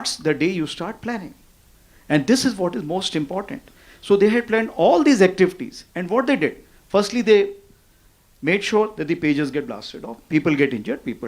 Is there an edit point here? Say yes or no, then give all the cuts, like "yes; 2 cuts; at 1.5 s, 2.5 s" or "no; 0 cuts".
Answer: no; 0 cuts